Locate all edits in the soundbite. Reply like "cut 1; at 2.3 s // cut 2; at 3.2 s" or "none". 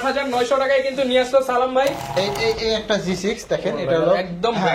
cut 1; at 2.0 s